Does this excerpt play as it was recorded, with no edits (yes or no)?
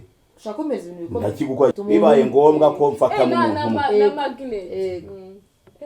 no